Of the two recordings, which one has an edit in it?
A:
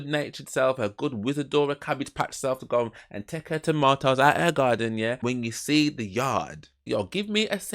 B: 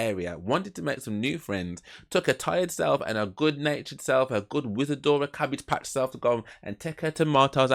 A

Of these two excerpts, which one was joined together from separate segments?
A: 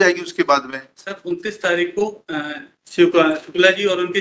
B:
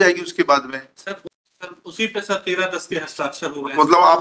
B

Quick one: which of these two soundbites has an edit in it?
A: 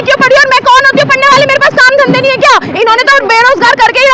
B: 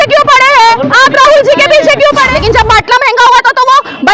B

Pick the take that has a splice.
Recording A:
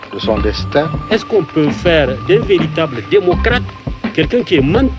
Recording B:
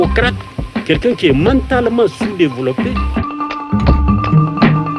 B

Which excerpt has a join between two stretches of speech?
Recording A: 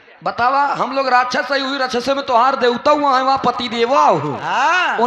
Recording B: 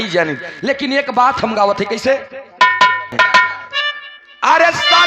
B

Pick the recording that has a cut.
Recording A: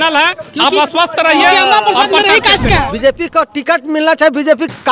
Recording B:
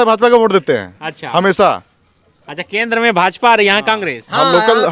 A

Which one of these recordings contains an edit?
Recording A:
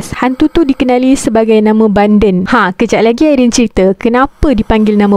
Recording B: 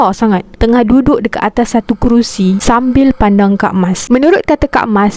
B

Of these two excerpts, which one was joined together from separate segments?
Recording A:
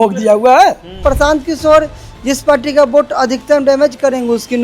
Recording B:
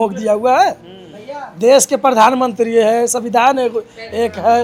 A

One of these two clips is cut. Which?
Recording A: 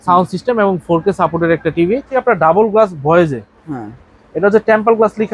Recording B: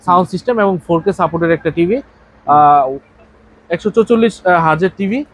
A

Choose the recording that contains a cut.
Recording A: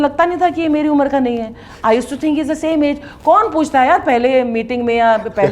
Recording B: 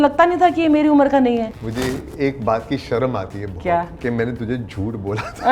B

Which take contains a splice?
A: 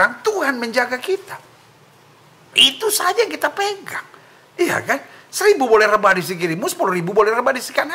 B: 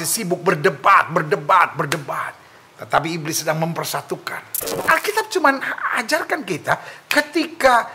B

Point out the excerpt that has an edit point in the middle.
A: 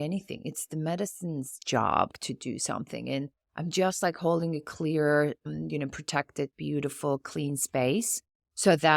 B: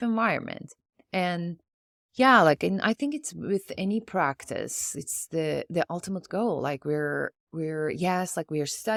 A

